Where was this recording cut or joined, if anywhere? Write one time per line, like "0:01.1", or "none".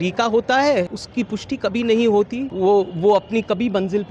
0:01.0
0:02.4